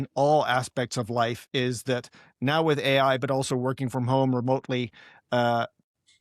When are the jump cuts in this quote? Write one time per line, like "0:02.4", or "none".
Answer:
none